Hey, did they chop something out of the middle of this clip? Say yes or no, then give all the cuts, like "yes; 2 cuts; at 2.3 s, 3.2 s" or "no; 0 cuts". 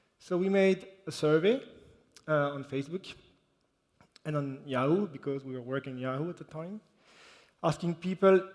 yes; 1 cut; at 2.8 s